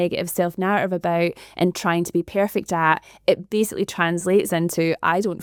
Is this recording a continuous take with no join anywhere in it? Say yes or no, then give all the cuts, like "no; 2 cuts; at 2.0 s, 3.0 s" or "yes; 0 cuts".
yes; 0 cuts